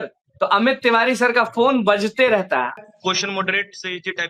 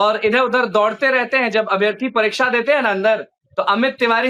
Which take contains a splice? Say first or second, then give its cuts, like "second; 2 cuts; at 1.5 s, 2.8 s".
first; 1 cut; at 2.7 s